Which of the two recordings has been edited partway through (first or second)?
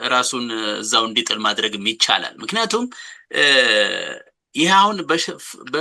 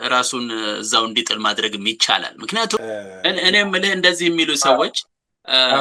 second